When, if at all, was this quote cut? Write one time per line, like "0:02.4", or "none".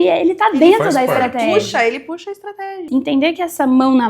0:02.8